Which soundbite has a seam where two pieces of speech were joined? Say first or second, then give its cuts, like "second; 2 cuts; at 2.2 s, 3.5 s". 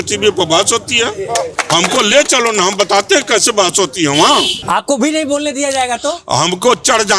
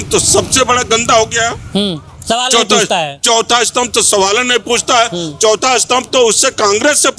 first; 2 cuts; at 1.6 s, 4.6 s